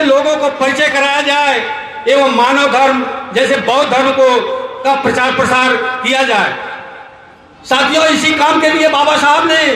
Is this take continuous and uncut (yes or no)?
yes